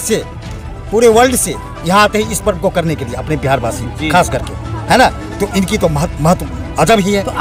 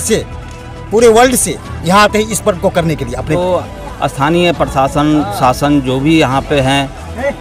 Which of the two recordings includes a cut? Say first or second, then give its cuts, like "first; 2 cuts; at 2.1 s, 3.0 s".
second; 1 cut; at 3.4 s